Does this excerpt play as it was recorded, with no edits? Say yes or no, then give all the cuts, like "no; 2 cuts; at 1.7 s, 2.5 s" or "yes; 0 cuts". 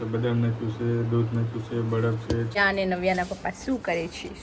no; 1 cut; at 2.6 s